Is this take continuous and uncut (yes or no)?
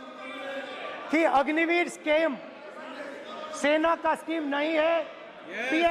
yes